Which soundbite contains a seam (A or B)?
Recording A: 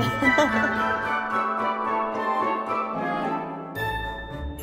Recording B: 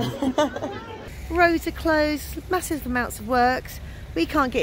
B